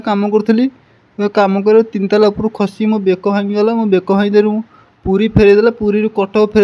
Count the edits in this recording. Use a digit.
0